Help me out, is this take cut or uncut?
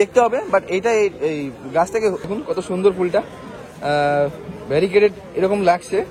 cut